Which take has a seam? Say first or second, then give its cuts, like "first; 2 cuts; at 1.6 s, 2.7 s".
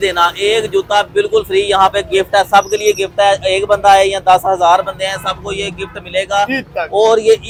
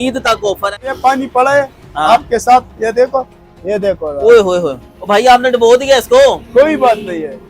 second; 1 cut; at 0.9 s